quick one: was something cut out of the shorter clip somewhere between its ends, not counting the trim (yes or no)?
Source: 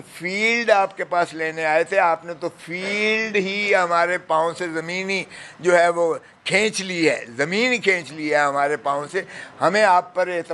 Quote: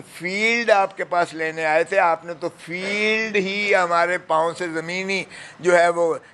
no